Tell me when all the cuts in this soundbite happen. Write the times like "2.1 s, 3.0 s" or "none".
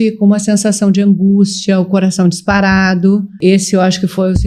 3.4 s